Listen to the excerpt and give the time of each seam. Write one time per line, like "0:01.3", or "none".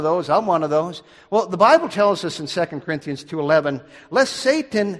none